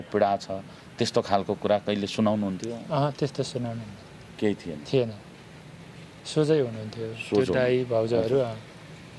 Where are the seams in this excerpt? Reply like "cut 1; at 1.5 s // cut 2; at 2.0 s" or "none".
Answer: none